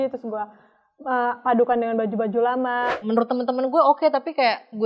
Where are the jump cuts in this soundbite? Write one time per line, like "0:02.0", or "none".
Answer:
0:03.0